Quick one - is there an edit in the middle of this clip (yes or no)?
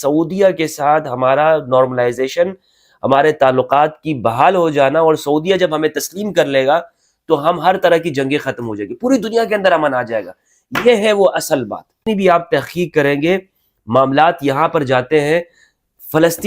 yes